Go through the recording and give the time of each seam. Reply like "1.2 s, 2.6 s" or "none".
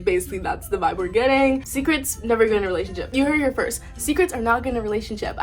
1.6 s

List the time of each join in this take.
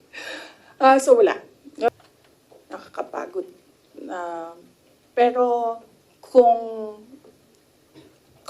1.9 s

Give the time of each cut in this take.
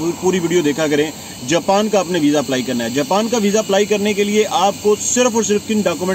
none

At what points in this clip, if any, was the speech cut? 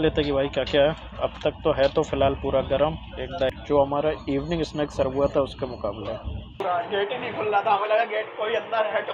3.5 s, 6.6 s

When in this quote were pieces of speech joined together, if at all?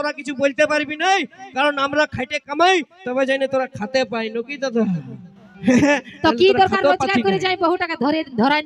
none

